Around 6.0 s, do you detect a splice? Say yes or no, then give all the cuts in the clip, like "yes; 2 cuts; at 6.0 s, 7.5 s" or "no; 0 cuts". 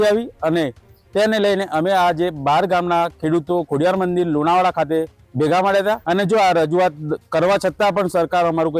yes; 1 cut; at 6.0 s